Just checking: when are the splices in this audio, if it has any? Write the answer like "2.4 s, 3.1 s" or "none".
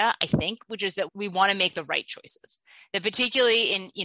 1.1 s